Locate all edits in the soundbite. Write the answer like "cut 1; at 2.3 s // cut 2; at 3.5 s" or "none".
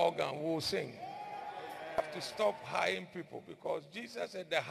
cut 1; at 2.0 s